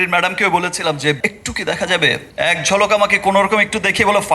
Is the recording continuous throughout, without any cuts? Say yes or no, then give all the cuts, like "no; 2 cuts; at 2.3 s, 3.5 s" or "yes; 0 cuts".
no; 2 cuts; at 1.2 s, 2.3 s